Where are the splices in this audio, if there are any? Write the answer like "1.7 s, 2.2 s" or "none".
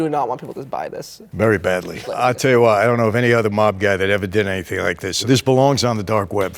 2.1 s, 5.2 s